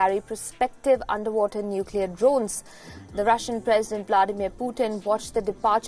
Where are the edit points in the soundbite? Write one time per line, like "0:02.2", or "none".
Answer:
none